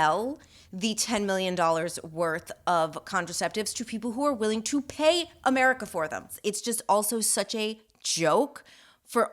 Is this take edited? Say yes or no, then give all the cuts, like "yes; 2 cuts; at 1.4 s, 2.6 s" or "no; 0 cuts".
yes; 1 cut; at 6.3 s